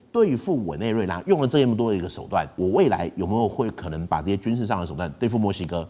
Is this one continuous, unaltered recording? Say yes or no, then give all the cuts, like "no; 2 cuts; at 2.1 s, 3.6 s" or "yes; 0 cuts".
no; 1 cut; at 2.5 s